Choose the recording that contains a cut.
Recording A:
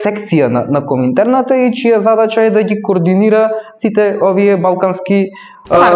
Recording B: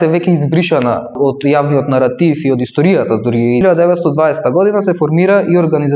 B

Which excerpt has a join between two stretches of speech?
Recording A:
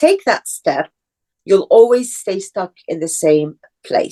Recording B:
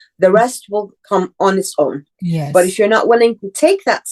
B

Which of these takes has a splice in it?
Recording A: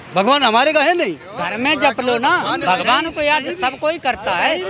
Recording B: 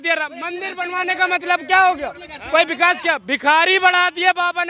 A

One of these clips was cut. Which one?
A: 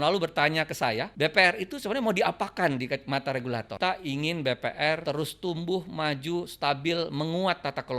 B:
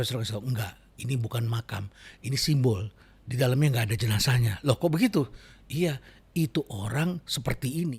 A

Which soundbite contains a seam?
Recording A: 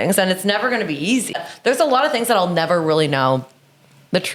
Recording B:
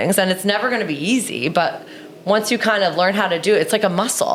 A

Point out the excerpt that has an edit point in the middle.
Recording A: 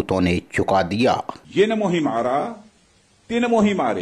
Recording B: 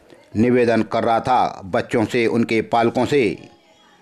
A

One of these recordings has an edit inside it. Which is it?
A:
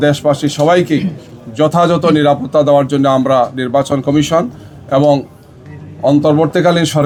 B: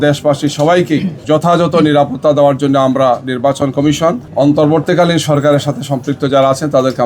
B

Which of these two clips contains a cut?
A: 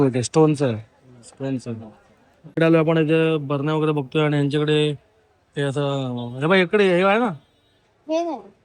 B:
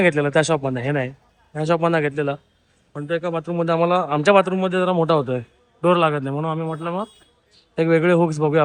A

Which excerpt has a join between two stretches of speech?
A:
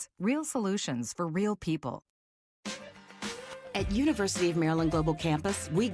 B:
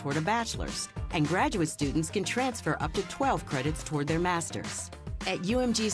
A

